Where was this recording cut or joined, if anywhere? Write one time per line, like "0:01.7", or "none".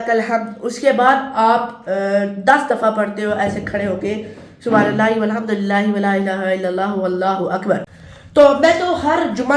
0:07.8